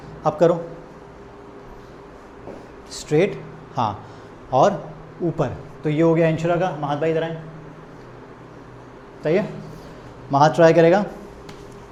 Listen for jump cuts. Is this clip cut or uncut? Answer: uncut